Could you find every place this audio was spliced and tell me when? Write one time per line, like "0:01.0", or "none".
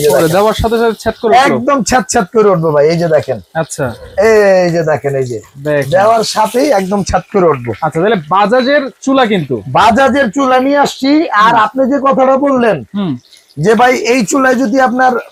none